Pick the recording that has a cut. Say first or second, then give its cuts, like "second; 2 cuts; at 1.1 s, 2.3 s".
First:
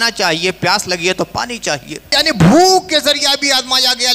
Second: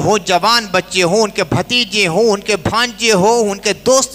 first; 1 cut; at 2.2 s